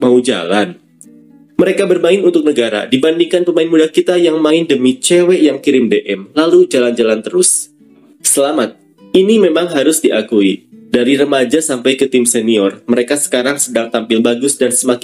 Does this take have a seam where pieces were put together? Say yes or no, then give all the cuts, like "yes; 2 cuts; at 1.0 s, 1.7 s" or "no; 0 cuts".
yes; 1 cut; at 8.1 s